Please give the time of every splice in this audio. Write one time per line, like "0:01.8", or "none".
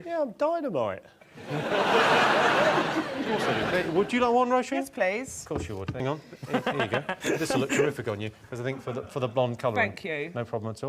0:03.3